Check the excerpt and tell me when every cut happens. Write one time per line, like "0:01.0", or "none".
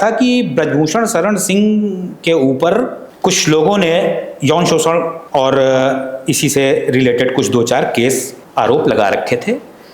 0:03.0
0:05.2
0:08.4